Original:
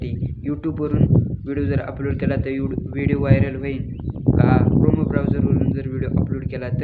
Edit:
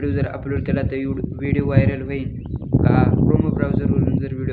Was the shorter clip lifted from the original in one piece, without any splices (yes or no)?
yes